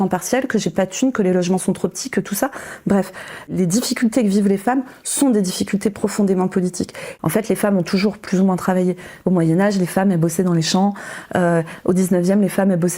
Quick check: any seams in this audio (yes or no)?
yes